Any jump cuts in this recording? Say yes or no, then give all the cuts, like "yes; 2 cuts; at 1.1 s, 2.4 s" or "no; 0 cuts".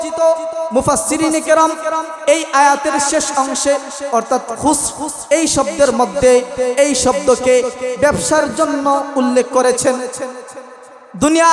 no; 0 cuts